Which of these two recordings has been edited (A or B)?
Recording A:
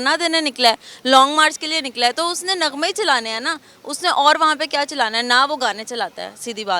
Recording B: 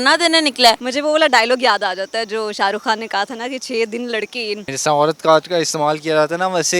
B